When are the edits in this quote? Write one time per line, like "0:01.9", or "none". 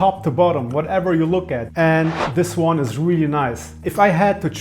0:01.7